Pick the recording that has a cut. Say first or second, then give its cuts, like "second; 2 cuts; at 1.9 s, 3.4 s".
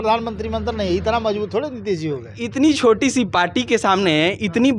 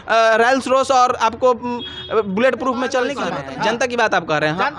second; 1 cut; at 3.2 s